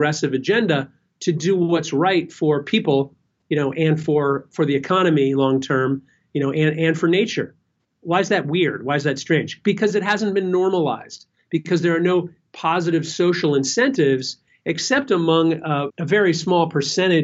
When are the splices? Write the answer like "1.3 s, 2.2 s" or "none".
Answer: 15.9 s